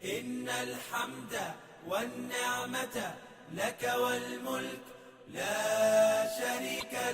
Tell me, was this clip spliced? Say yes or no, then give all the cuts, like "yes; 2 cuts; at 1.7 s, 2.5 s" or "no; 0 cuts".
yes; 1 cut; at 6.3 s